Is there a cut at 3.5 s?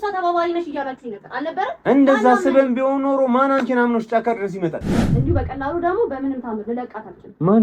no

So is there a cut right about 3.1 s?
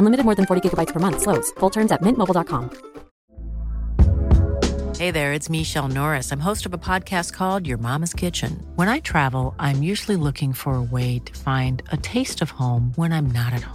yes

